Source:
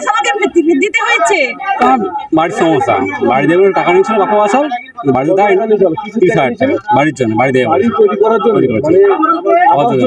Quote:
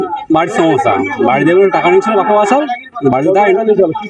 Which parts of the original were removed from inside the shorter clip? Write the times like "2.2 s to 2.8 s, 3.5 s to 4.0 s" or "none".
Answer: none